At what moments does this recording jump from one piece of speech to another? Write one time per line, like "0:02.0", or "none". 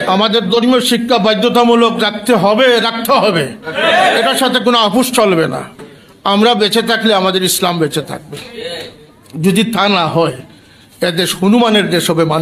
none